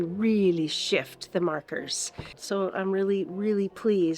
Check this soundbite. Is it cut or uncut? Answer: cut